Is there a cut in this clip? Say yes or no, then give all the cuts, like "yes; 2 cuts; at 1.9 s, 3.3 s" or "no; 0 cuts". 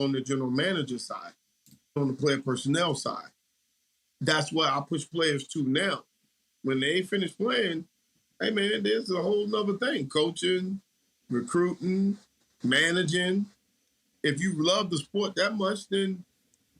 yes; 1 cut; at 2.0 s